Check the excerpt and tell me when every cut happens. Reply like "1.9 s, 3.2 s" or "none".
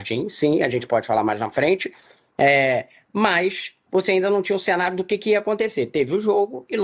none